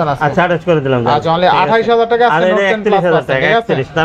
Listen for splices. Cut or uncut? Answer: uncut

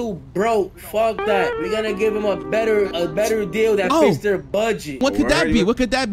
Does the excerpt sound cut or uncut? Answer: cut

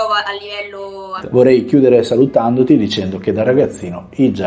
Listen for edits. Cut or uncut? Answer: cut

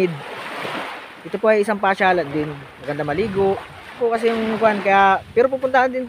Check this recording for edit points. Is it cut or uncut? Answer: cut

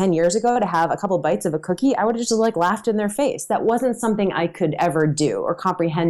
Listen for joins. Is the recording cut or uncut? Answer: uncut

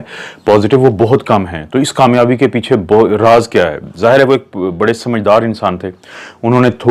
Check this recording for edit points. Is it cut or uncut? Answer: uncut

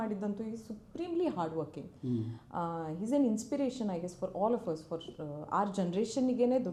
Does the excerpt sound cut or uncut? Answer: uncut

